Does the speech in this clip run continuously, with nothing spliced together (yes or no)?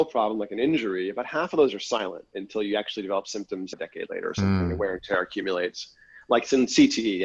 no